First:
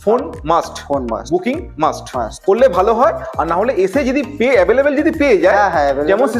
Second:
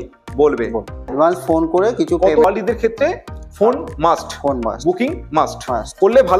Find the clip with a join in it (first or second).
second